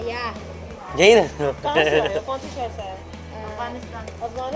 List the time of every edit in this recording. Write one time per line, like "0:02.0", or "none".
none